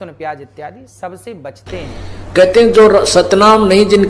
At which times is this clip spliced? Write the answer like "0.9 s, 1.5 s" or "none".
1.9 s